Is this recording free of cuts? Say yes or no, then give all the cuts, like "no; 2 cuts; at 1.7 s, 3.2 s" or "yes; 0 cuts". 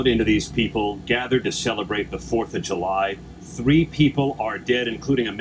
yes; 0 cuts